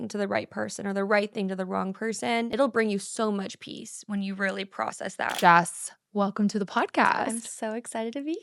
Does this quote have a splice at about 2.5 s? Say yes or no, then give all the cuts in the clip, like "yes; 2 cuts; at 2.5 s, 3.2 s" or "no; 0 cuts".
yes; 2 cuts; at 2.5 s, 5.4 s